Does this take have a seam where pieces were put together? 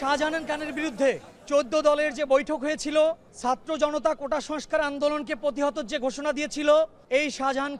yes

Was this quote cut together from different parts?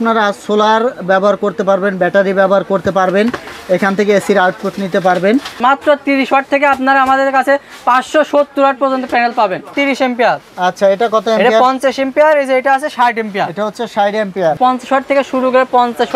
yes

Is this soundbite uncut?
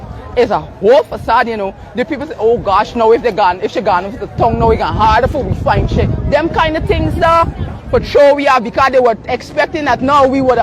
yes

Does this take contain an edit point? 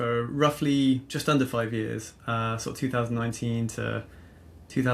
no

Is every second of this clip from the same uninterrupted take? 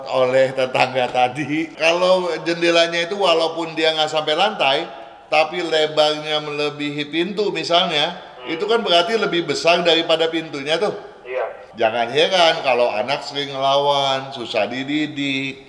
no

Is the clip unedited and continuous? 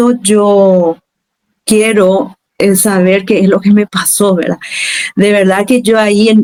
yes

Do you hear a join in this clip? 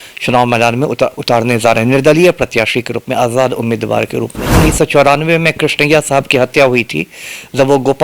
yes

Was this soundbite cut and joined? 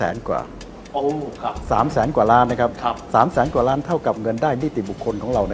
no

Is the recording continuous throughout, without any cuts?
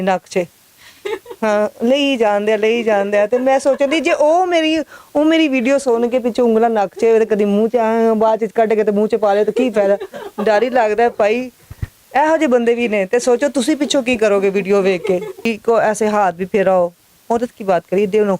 no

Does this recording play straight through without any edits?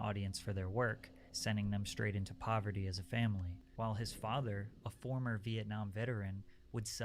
no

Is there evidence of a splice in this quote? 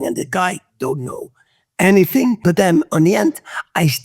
yes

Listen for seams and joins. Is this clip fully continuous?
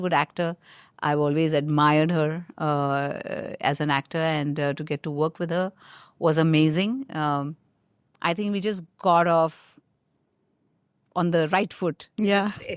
yes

